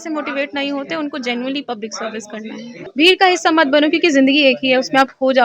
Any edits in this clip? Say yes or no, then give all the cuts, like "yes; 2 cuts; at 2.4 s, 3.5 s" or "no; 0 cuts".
yes; 1 cut; at 2.8 s